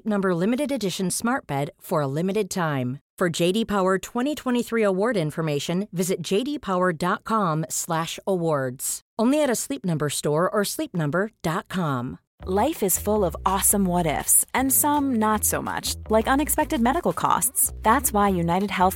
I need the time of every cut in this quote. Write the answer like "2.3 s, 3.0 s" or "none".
12.3 s